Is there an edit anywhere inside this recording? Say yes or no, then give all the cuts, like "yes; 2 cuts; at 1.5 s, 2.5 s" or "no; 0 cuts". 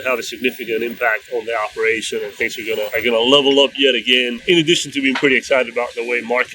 yes; 2 cuts; at 2.9 s, 4.4 s